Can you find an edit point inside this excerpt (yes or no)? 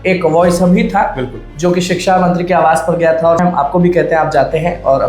yes